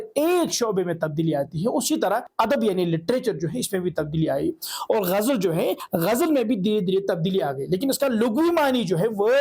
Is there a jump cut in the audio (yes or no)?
yes